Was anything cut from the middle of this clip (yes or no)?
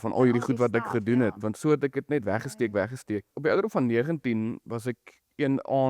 yes